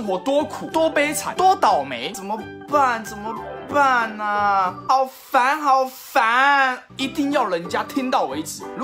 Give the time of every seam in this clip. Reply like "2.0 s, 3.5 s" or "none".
2.0 s